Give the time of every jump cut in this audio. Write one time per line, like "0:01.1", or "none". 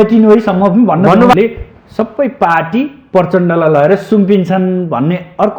0:01.3

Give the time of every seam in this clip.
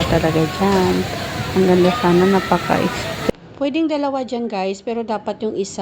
0:03.3

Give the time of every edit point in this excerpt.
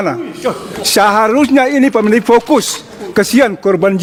none

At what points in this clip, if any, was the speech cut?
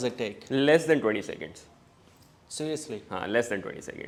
none

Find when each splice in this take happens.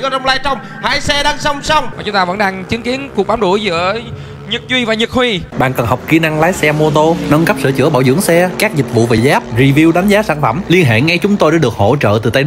0:01.9
0:05.5

